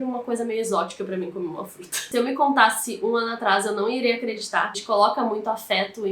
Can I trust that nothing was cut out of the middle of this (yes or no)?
no